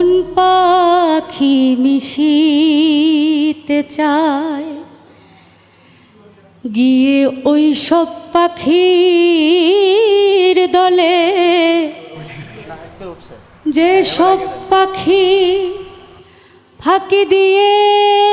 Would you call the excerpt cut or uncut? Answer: uncut